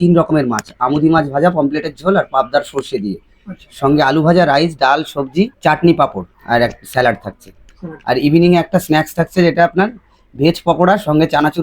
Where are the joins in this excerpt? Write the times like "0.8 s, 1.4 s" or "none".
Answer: 5.5 s, 6.3 s